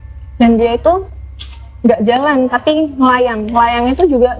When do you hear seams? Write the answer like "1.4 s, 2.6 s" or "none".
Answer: none